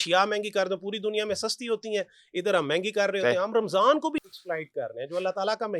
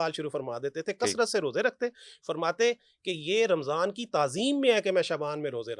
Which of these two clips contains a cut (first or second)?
first